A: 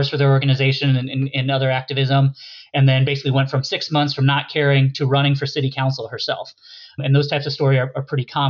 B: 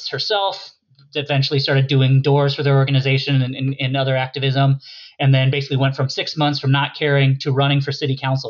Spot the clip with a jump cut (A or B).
A